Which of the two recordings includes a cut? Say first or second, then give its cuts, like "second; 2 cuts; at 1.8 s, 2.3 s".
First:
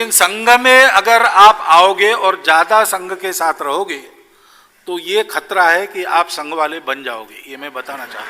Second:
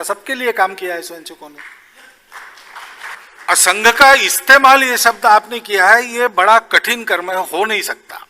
second; 1 cut; at 3.2 s